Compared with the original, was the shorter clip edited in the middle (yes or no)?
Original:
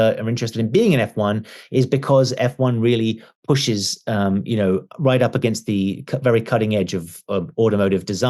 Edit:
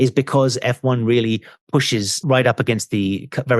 yes